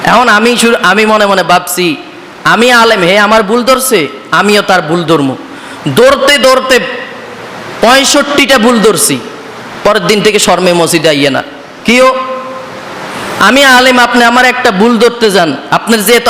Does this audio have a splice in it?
no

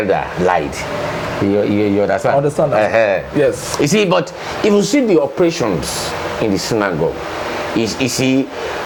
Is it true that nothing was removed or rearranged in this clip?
yes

